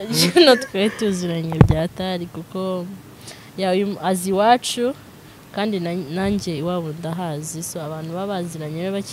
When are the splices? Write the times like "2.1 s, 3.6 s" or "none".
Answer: none